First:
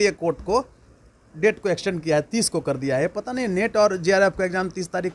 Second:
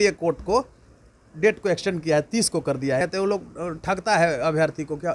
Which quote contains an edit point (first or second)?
second